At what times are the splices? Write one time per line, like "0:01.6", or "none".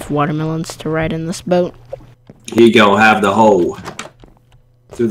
0:02.6